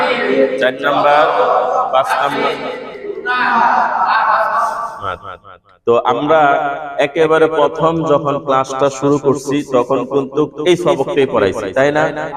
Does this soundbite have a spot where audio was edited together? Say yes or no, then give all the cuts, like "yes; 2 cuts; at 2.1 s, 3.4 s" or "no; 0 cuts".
no; 0 cuts